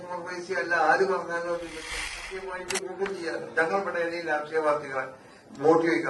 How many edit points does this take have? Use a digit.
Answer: 1